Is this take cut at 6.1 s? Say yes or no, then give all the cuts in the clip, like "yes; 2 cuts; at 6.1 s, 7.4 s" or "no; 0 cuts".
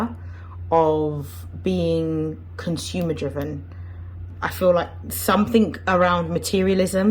no; 1 cut; at 4.3 s